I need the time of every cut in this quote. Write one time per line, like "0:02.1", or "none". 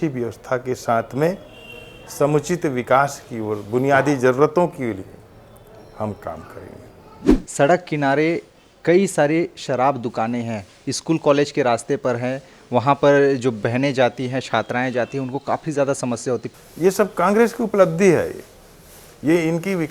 0:07.3
0:16.6

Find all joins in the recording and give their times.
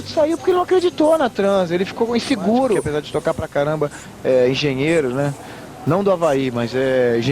0:02.9

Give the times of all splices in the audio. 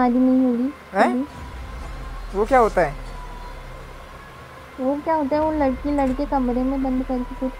none

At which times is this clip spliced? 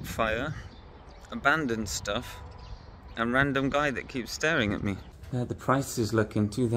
0:05.1

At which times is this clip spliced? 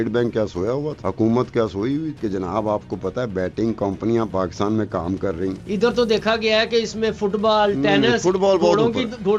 0:01.0
0:02.1
0:05.6

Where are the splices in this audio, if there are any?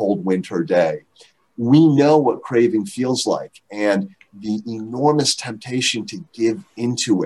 none

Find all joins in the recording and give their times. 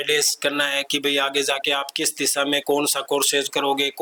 none

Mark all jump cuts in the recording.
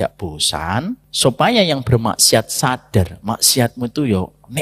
0:01.1

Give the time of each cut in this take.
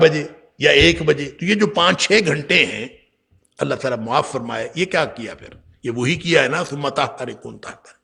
none

